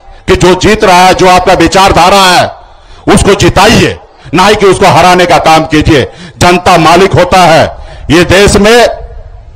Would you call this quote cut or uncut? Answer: uncut